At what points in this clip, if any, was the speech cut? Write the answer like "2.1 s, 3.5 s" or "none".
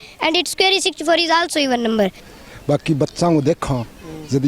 2.3 s

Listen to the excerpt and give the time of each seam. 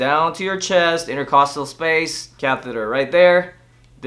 2.2 s

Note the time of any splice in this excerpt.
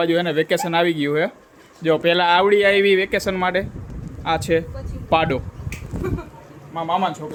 none

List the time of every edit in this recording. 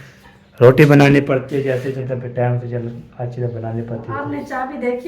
2.0 s

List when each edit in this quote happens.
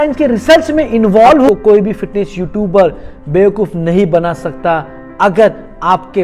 1.5 s

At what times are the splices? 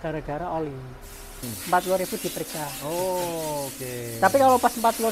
1.5 s

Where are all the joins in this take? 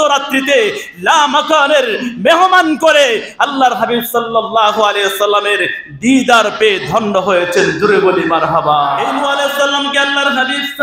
9.2 s

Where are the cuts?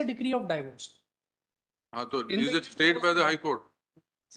none

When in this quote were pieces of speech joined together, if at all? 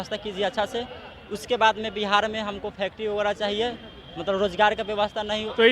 none

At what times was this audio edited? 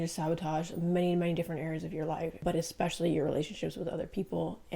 2.4 s

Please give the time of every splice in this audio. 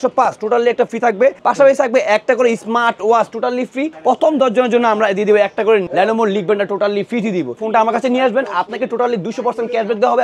1.4 s, 3.9 s, 5.9 s, 7.6 s

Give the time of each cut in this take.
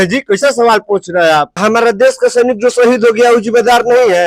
1.5 s

